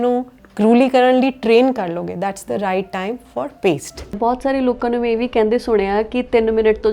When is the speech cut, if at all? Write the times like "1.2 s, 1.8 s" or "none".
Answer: 4.2 s

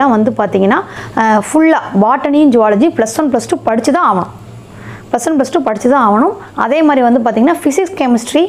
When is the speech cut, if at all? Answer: none

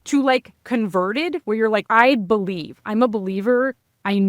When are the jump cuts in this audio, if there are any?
1.9 s

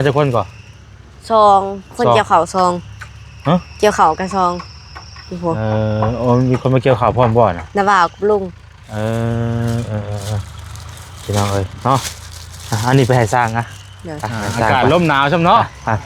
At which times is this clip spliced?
14.7 s

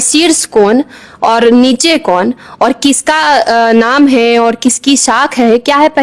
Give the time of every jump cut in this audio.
none

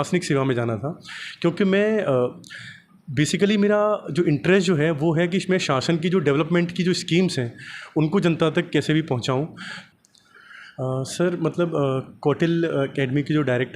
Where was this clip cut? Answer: 9.8 s

